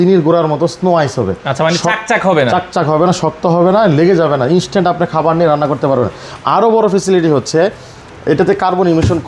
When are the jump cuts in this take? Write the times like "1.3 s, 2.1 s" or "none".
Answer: none